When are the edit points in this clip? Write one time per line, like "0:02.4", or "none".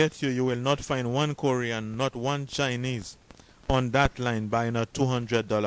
none